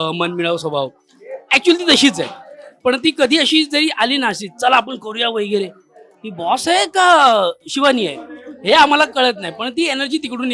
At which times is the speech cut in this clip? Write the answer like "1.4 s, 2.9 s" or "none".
none